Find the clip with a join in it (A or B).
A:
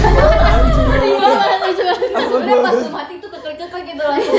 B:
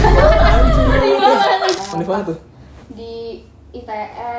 B